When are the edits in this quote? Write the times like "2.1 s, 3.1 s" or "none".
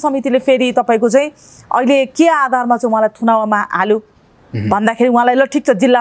none

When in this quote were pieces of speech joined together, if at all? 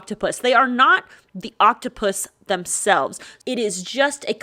3.3 s

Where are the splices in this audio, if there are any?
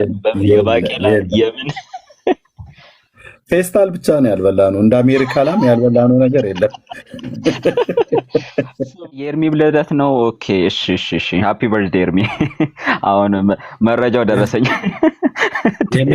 9.0 s

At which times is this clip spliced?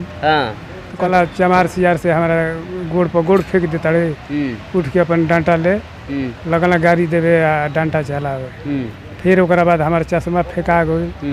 none

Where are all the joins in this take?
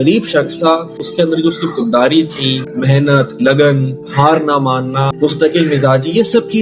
1.0 s, 2.6 s, 5.1 s

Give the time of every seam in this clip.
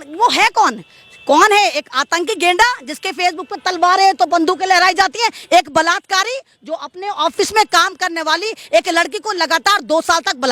none

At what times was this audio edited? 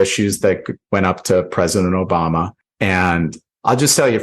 2.6 s, 3.4 s

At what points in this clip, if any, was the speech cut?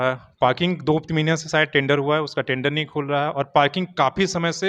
none

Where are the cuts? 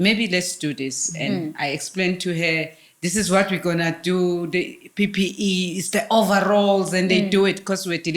none

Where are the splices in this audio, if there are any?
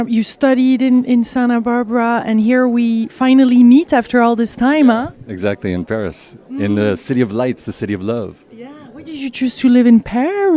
7.9 s

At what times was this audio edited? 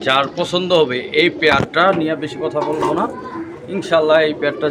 none

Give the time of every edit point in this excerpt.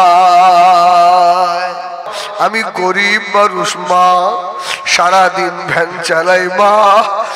2.1 s

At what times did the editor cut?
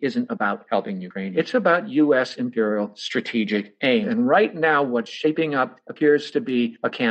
1.3 s, 4.1 s

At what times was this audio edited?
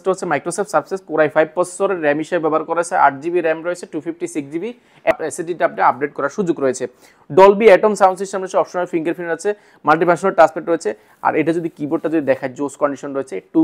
5.1 s

